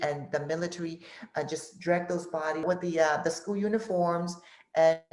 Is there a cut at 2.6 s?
yes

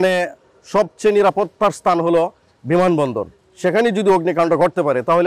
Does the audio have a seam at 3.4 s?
no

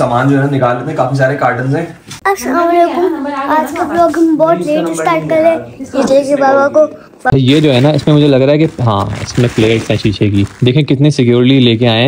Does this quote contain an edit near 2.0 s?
yes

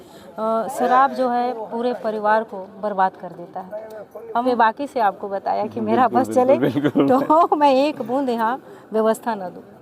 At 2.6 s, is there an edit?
no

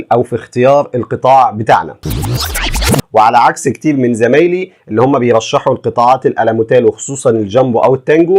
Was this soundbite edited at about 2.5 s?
yes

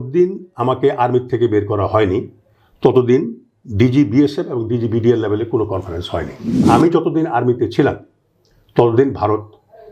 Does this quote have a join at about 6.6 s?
yes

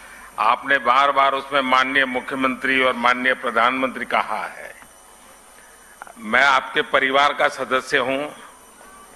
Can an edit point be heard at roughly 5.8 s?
yes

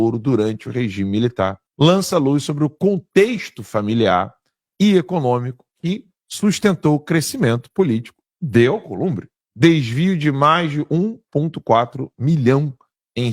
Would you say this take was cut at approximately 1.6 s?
yes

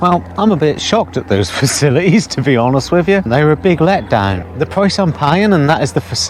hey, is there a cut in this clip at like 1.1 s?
no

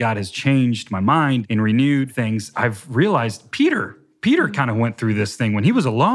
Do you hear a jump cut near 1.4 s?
yes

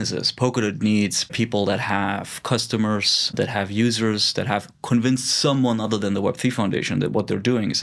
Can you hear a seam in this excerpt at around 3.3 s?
yes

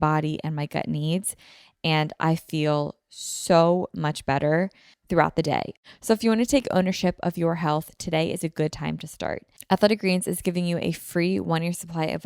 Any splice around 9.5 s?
yes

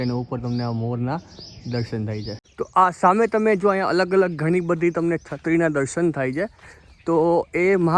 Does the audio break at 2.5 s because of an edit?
yes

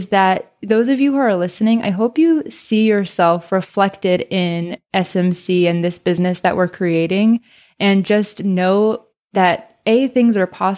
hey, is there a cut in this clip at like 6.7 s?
no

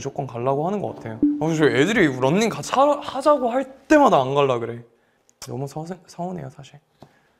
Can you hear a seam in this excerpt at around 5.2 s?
no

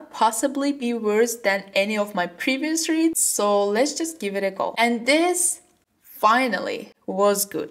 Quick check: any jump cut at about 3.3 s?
no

